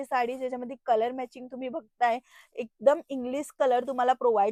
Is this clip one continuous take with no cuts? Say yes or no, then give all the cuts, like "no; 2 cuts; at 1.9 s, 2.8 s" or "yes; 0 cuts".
yes; 0 cuts